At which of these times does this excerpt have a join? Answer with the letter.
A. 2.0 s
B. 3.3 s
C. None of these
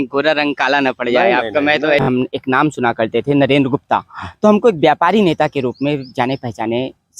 A